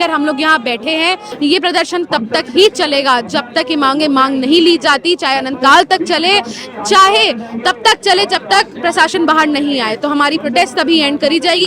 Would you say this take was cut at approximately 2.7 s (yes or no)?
no